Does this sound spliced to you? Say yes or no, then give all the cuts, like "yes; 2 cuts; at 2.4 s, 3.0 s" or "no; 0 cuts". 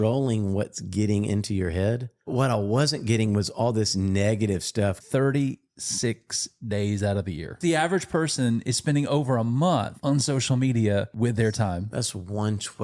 yes; 4 cuts; at 2.3 s, 5.0 s, 7.5 s, 9.9 s